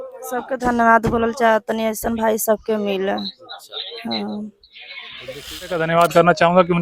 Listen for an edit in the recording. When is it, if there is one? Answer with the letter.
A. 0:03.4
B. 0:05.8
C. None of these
B